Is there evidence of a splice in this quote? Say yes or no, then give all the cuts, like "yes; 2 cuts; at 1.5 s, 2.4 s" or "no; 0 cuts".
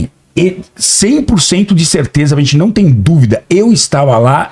no; 0 cuts